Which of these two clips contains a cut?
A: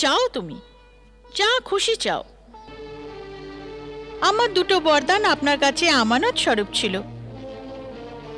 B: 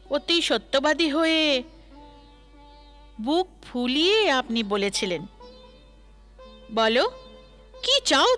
A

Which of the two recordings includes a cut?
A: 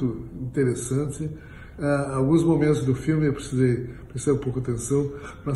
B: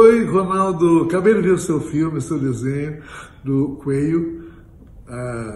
B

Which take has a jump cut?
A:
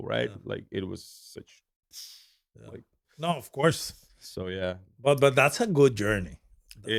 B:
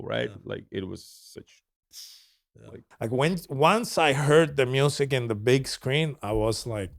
B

